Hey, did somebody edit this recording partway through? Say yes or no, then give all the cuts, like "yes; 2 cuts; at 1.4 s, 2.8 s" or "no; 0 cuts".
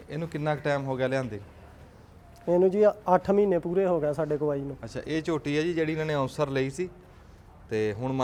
no; 0 cuts